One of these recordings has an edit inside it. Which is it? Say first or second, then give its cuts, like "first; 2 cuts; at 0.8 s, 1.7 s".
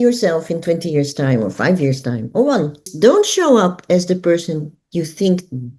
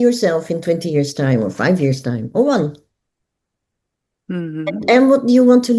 first; 1 cut; at 2.9 s